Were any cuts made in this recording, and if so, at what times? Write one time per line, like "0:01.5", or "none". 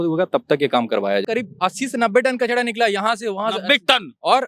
0:01.2

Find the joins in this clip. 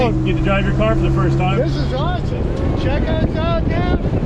0:02.1

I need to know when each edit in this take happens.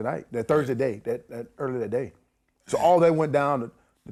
none

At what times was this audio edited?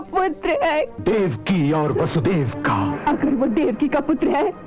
0:00.9
0:02.9

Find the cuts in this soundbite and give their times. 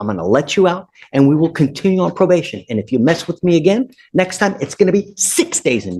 none

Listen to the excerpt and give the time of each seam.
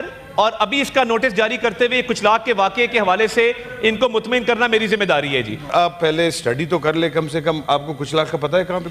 0:05.7

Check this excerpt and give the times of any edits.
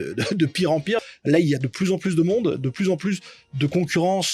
0:01.0

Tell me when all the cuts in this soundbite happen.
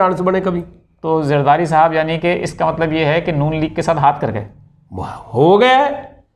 none

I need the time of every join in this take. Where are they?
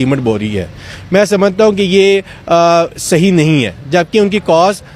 none

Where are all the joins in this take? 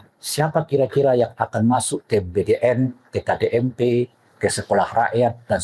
none

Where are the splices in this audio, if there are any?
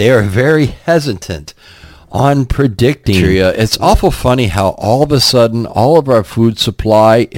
0:03.2

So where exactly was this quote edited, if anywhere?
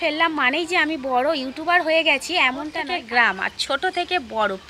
0:02.8

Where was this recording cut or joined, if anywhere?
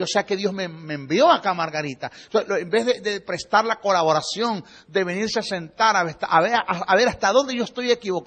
none

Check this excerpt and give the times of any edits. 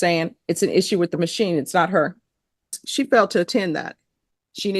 0:02.8

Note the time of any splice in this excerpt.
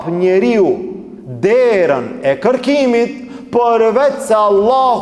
none

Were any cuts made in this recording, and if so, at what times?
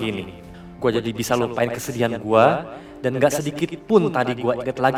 none

